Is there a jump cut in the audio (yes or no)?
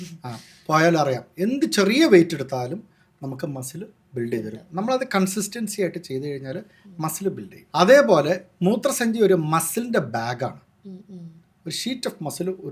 yes